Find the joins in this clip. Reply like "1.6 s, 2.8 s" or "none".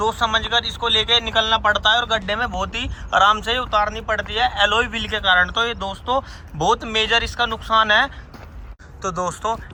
none